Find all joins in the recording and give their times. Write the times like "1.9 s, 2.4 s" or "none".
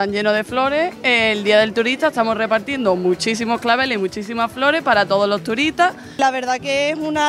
6.2 s